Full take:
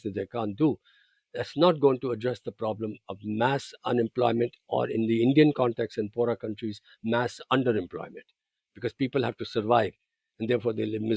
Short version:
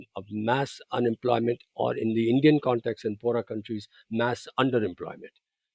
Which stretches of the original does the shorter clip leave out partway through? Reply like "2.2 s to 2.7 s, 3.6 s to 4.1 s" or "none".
none